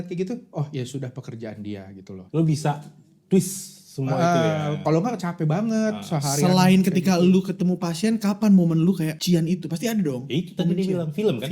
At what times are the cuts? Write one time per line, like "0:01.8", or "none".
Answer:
0:02.1